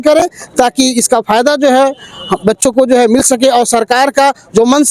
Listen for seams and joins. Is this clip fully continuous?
yes; 0 cuts

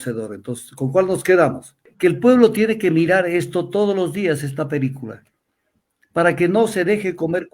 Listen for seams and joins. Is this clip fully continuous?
no; 1 cut; at 1.8 s

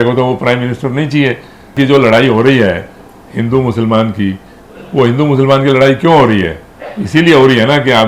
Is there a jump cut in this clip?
yes; 1 cut; at 1.7 s

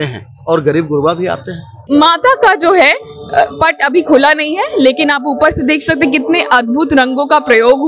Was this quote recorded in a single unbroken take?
no; 1 cut; at 1.8 s

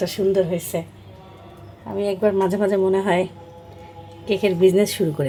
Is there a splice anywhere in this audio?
no; 0 cuts

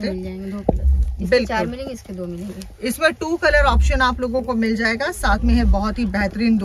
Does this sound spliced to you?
no; 0 cuts

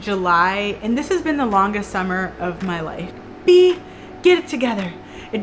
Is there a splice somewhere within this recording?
yes; 1 cut; at 3.2 s

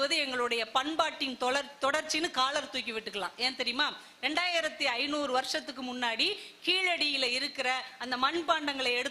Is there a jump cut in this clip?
no; 0 cuts

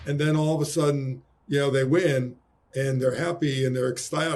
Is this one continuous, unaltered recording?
yes; 0 cuts

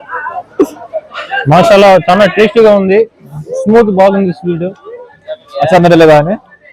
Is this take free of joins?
yes; 0 cuts

